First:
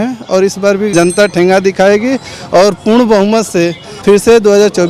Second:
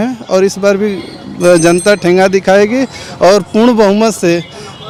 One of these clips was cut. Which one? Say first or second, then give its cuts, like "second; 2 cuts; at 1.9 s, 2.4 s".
first; 2 cuts; at 0.9 s, 3.9 s